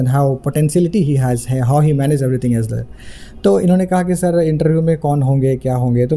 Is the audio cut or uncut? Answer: uncut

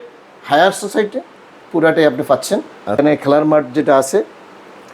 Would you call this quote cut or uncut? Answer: cut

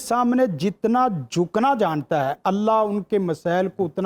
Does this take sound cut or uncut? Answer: uncut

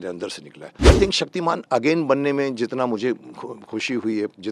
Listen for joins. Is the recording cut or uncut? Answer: cut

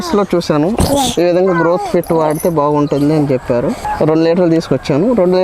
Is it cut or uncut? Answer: cut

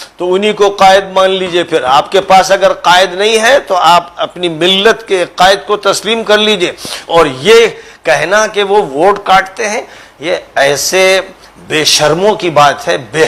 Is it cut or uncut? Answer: uncut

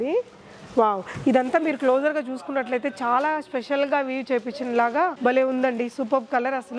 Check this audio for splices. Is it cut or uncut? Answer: uncut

